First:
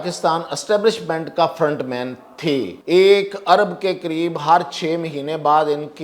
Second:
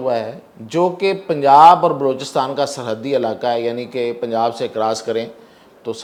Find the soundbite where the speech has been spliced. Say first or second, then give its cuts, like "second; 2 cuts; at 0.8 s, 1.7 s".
first; 1 cut; at 2.8 s